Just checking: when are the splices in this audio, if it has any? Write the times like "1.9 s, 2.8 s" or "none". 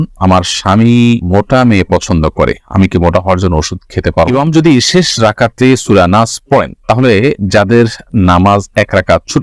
4.3 s